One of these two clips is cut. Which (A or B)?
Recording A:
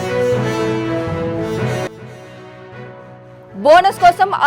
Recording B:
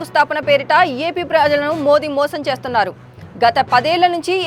A